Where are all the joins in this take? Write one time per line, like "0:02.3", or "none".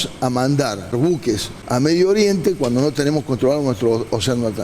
0:01.1